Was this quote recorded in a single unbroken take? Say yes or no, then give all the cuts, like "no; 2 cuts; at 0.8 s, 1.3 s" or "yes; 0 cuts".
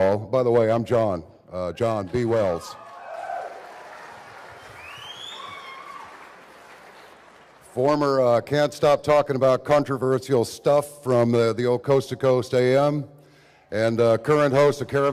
no; 1 cut; at 13.9 s